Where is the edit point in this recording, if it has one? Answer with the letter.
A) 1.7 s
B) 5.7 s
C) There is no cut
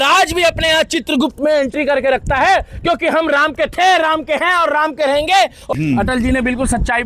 B